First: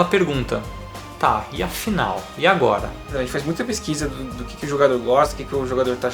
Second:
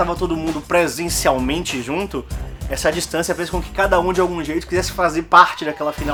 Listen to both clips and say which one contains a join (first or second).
first